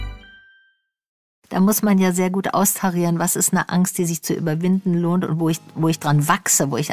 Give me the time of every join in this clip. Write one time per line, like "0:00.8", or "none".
0:01.3